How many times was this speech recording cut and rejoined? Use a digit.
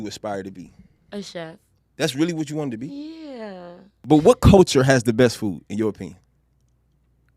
1